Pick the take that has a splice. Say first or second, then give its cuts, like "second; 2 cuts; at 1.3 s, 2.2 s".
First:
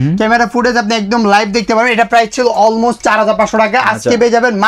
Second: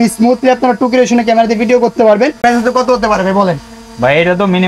second; 1 cut; at 2.4 s